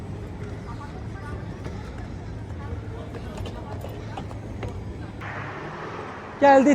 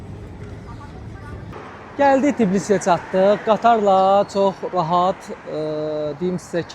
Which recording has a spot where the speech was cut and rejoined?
second; 1 cut; at 1.5 s

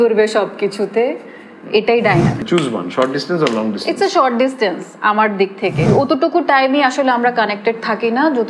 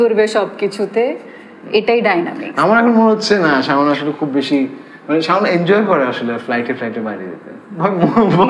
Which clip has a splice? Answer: first; 2 cuts; at 2.4 s, 5.9 s

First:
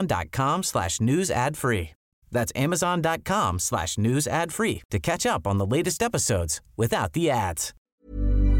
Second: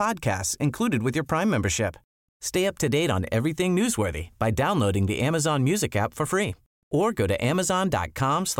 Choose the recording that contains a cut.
first; 1 cut; at 7.7 s

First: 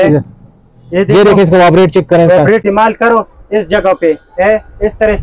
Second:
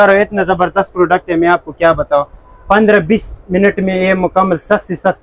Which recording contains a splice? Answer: first; 1 cut; at 2.6 s

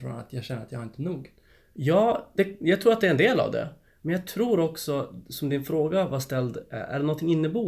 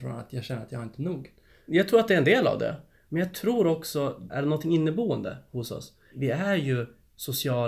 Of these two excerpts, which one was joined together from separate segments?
second; 3 cuts; at 1.6 s, 4.3 s, 6.1 s

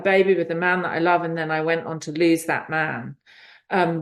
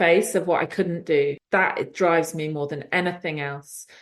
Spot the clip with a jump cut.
second; 1 cut; at 1.4 s

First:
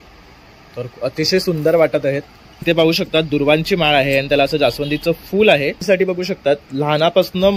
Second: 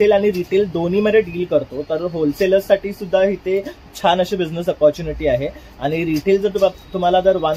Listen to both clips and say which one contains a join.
first; 2 cuts; at 2.6 s, 5.8 s

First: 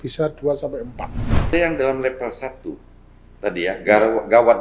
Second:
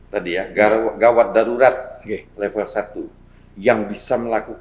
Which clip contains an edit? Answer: first; 1 cut; at 1.5 s

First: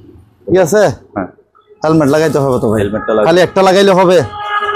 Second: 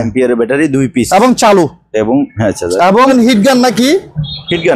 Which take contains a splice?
second; 1 cut; at 3.1 s

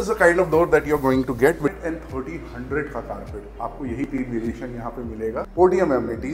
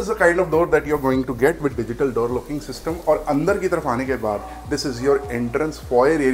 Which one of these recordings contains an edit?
first; 2 cuts; at 1.7 s, 5.5 s

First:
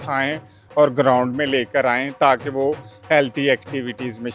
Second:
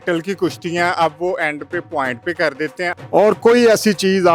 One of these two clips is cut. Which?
second; 1 cut; at 2.9 s

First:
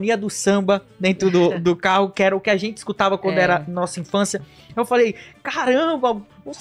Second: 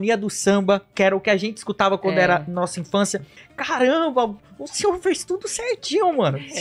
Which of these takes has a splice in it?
second; 2 cuts; at 0.9 s, 3.4 s

